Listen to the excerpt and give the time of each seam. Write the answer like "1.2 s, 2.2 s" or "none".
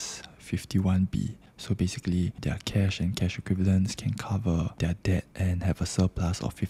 2.4 s, 4.9 s

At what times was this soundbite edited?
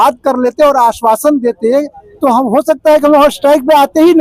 none

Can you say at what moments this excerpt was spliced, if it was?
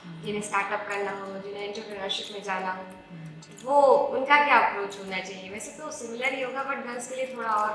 none

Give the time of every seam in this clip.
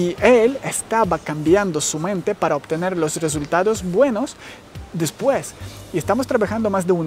none

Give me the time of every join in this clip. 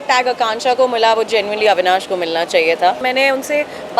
3.0 s

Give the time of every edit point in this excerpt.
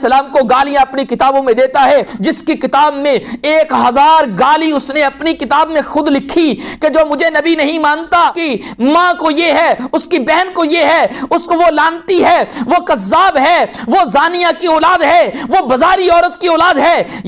2.1 s, 8.4 s

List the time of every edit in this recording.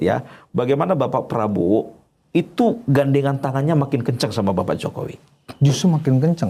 none

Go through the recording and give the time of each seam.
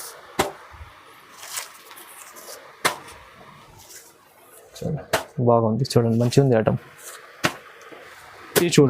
7.9 s

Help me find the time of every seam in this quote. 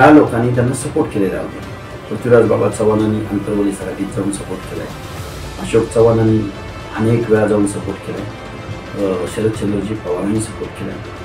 none

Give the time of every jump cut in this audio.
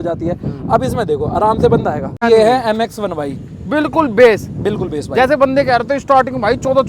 2.2 s

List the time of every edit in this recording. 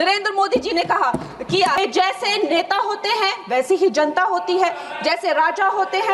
1.8 s

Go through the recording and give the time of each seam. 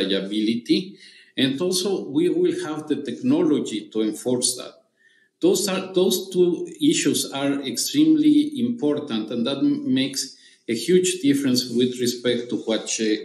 none

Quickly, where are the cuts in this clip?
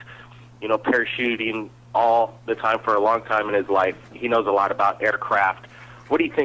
none

